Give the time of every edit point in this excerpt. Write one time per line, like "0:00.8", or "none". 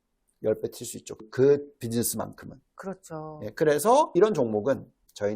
0:01.2
0:04.1